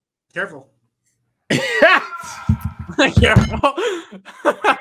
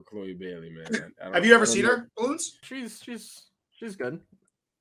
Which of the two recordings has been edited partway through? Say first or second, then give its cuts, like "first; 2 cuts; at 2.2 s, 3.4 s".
second; 1 cut; at 2.6 s